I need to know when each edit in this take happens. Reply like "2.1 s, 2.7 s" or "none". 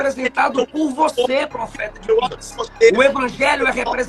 none